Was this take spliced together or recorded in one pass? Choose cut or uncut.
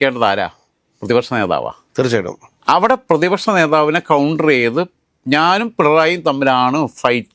uncut